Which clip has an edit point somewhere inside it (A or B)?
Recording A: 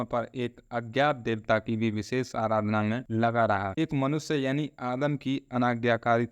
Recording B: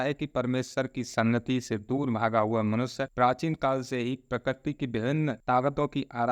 A